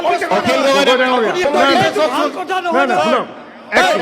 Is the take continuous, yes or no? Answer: no